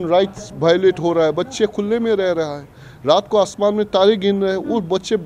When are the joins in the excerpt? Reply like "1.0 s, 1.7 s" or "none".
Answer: none